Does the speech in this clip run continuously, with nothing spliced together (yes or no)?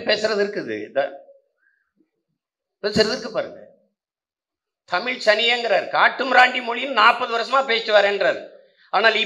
yes